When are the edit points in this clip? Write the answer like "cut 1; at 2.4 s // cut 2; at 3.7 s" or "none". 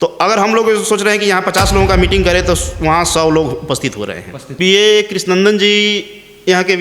cut 1; at 4.4 s